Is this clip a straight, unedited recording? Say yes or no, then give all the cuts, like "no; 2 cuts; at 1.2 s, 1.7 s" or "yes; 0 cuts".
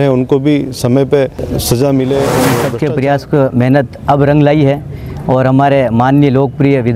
no; 2 cuts; at 1.5 s, 2.6 s